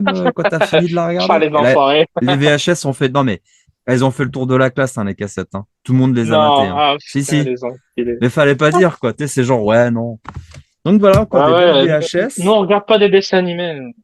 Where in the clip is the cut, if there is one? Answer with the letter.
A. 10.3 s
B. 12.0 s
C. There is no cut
C